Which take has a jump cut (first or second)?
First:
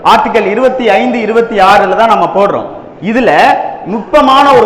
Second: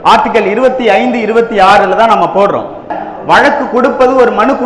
second